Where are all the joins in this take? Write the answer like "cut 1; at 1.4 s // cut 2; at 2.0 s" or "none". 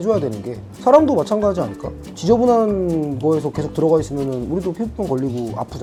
none